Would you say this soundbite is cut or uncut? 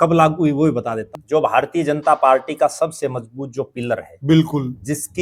cut